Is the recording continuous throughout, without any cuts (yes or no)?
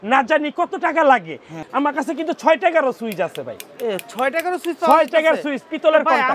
no